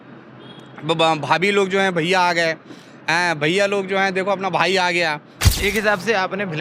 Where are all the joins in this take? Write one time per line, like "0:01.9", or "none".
0:05.5